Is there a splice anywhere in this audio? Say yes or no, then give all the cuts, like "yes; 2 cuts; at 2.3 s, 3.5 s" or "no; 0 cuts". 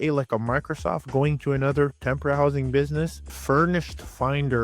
yes; 1 cut; at 3.3 s